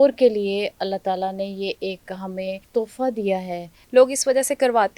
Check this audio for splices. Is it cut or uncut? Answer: cut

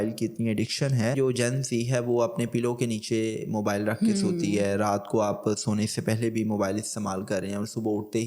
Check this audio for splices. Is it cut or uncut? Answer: cut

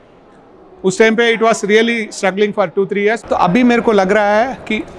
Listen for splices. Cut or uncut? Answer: cut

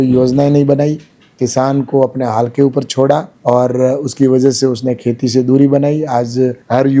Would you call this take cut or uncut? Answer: uncut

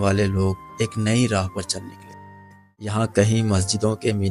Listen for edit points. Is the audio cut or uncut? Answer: cut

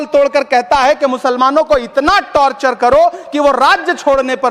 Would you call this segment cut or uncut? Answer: uncut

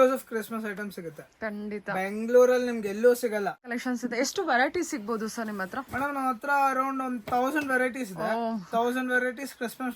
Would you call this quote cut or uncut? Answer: cut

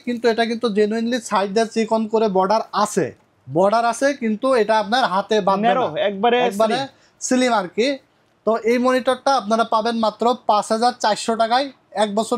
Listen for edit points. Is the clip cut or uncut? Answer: uncut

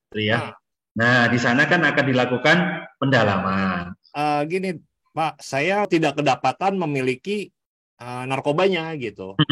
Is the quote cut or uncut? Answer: cut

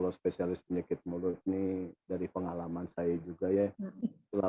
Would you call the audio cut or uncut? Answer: uncut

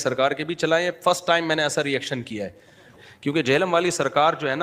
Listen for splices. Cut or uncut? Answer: cut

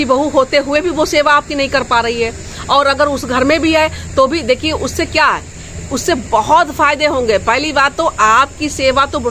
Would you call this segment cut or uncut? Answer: uncut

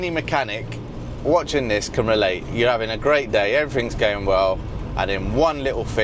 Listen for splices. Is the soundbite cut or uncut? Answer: uncut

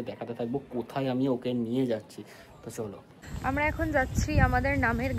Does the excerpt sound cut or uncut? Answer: cut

